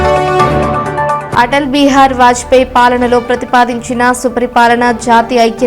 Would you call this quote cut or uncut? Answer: cut